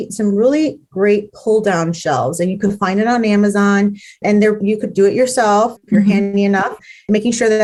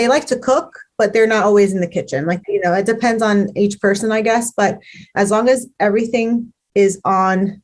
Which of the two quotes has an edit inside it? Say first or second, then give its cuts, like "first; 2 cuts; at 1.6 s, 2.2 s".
second; 1 cut; at 2.4 s